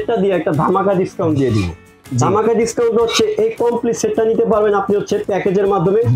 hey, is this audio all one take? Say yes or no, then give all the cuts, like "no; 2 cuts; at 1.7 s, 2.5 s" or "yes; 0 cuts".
yes; 0 cuts